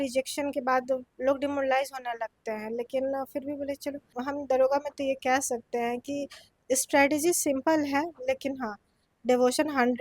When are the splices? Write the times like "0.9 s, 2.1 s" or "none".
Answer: 4.1 s